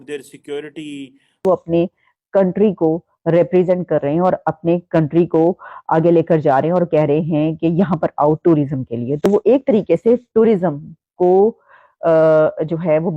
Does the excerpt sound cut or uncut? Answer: cut